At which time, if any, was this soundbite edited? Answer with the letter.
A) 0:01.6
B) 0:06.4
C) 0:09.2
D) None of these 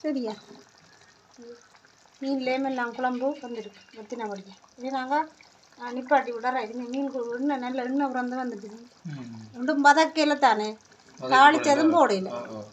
D